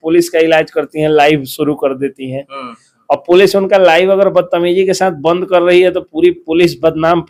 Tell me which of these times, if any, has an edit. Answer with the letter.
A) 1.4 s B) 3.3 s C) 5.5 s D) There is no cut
D